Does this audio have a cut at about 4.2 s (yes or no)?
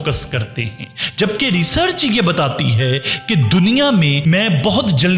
yes